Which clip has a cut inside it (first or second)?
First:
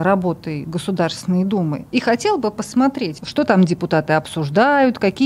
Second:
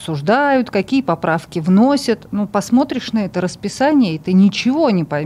first